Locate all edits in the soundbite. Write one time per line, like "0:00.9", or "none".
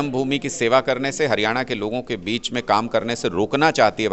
none

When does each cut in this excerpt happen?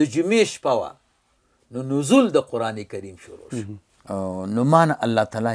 0:03.9

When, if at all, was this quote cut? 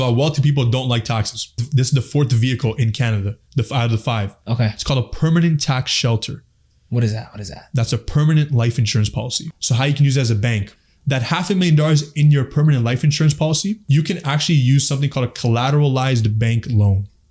0:01.6
0:09.5
0:10.8
0:13.8

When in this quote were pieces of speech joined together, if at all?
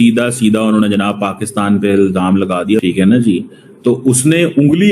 0:02.8

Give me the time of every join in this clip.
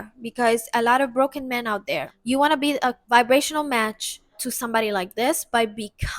0:02.1
0:03.0
0:04.5

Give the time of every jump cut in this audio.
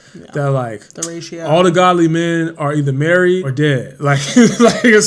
0:03.5

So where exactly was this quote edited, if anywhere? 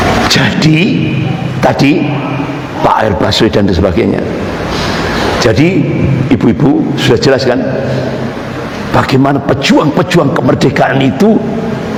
none

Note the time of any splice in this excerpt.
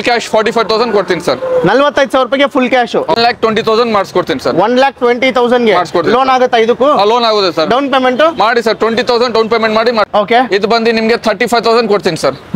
0:03.1
0:10.1

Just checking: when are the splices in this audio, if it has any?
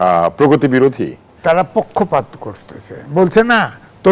0:01.4

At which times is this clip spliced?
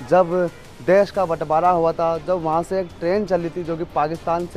none

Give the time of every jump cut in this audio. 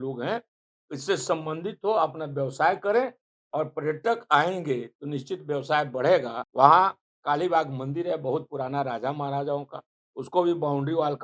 0:06.4

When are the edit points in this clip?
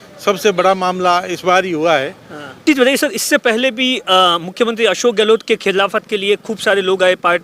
0:02.6

